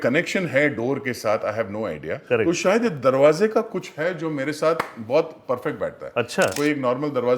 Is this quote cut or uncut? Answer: cut